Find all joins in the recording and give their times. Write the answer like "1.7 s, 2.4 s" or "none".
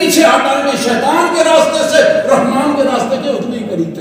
none